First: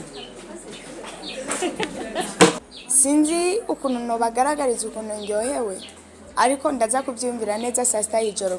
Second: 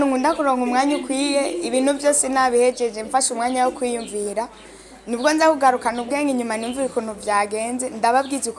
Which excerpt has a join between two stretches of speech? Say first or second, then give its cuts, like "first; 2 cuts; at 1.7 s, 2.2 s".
first; 1 cut; at 2.7 s